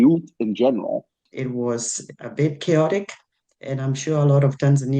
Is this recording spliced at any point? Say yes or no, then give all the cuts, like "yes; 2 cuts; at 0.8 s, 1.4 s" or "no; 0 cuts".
yes; 1 cut; at 1.2 s